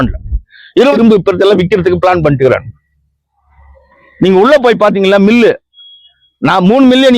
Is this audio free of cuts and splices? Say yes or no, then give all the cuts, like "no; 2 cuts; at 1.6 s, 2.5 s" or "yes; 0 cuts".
no; 1 cut; at 1.0 s